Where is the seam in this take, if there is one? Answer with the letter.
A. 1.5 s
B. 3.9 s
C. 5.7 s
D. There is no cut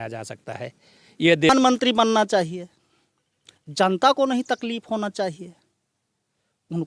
A